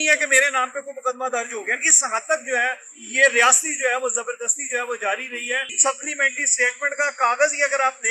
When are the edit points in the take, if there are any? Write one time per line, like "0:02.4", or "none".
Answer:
0:05.7